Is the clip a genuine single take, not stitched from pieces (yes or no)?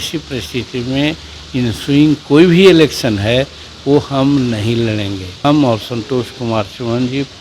no